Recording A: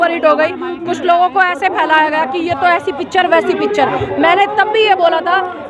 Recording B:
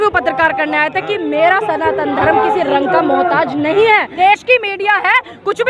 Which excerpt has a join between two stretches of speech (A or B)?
B